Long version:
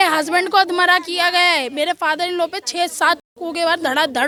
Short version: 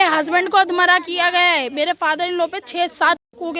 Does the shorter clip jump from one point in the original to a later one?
no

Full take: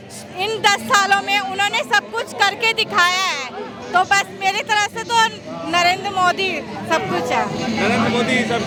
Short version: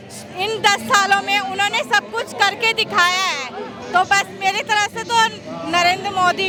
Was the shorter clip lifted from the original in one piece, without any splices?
yes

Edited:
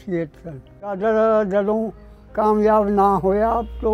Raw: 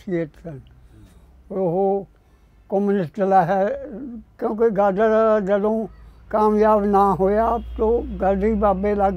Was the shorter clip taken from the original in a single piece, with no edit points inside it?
no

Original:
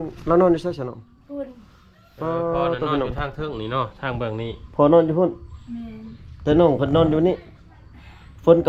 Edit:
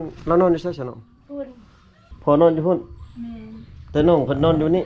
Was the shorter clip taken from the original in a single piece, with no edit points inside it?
no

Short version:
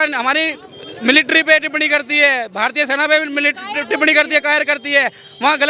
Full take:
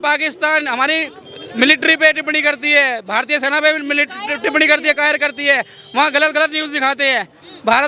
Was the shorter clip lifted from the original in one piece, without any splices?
yes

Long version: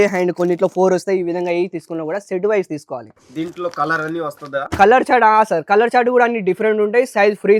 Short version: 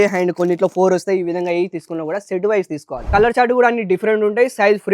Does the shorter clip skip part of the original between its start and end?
yes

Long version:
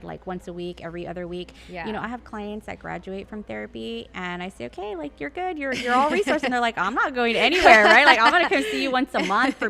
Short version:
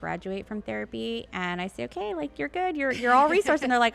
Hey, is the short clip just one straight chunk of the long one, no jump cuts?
yes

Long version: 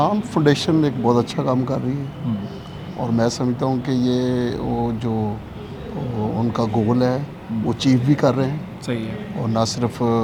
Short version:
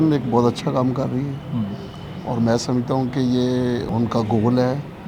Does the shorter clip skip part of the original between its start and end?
yes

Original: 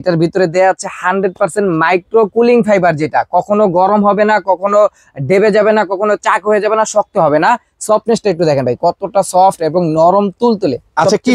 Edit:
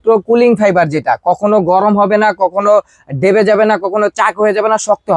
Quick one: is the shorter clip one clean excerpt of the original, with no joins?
yes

